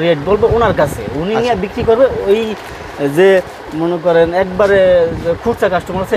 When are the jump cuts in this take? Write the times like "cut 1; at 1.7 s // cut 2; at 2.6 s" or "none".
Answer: none